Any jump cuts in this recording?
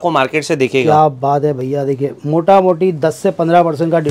no; 0 cuts

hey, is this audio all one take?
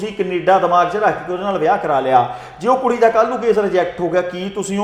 yes; 0 cuts

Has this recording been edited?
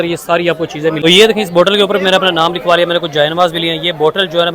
yes; 1 cut; at 1.0 s

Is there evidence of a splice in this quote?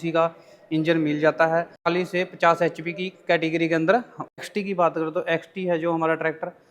yes; 2 cuts; at 1.9 s, 4.7 s

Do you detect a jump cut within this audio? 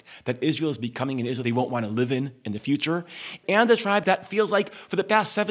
yes; 3 cuts; at 1.4 s, 3.4 s, 4.0 s

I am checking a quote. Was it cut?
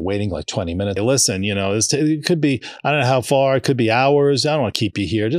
yes; 1 cut; at 1.0 s

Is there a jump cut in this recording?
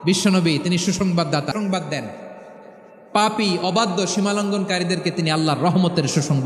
yes; 1 cut; at 1.5 s

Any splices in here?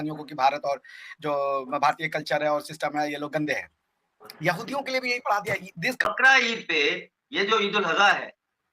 yes; 1 cut; at 6.1 s

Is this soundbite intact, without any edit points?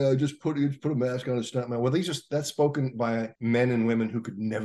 no; 1 cut; at 3.3 s

